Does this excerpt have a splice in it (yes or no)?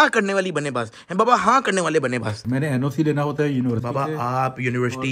yes